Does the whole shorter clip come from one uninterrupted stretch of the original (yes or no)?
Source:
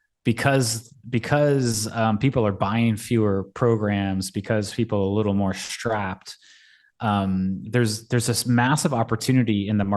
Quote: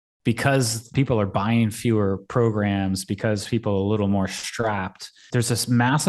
no